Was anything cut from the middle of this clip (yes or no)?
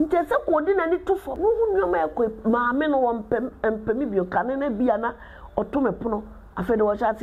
yes